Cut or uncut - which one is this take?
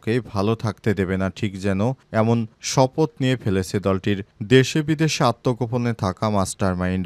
uncut